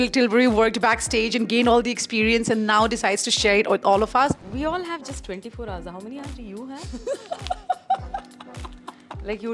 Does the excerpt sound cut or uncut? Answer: cut